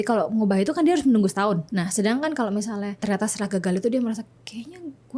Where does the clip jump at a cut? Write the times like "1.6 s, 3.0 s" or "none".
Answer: 1.7 s, 2.9 s